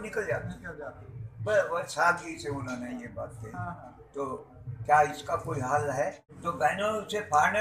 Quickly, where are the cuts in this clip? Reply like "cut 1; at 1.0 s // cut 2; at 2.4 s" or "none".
cut 1; at 6.3 s